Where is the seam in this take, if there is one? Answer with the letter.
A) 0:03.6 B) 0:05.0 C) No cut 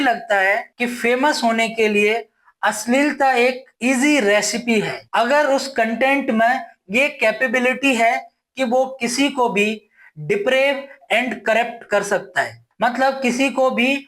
B